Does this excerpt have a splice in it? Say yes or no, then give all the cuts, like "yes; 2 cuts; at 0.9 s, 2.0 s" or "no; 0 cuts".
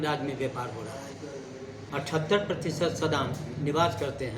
yes; 1 cut; at 1.8 s